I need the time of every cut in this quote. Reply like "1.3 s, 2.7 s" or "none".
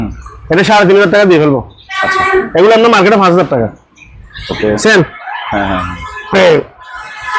4.7 s